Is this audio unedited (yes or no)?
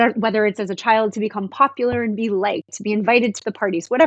yes